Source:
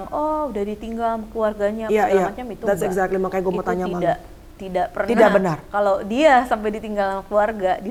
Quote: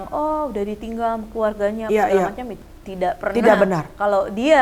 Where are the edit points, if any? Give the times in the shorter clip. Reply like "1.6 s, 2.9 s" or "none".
2.5 s